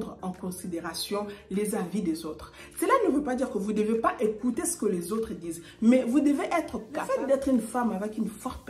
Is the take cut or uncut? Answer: cut